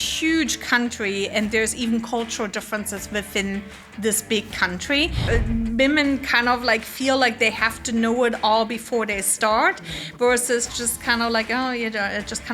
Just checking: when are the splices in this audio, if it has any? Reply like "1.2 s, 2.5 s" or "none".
5.2 s

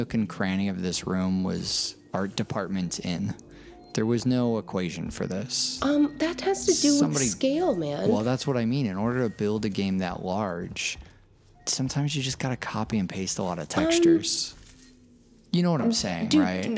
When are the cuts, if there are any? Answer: none

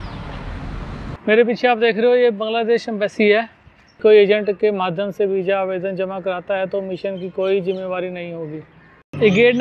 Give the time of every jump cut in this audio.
1.1 s, 4.0 s

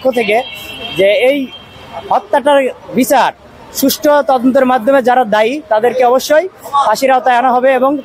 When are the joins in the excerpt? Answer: none

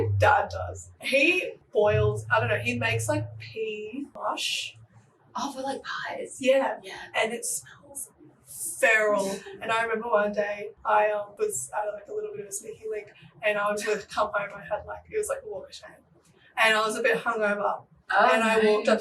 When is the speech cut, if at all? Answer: 1.3 s, 10.7 s

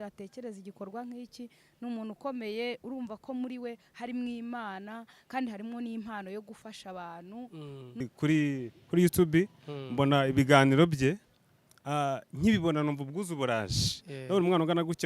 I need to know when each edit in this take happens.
8.1 s

